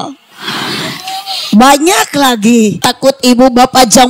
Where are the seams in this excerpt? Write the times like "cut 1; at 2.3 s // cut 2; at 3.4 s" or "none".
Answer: cut 1; at 2.8 s